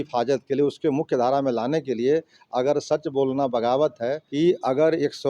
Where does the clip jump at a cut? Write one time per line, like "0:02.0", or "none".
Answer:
0:04.2